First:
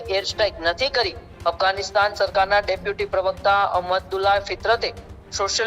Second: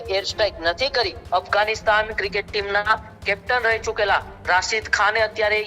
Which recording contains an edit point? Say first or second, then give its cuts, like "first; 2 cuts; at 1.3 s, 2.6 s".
second; 1 cut; at 1.2 s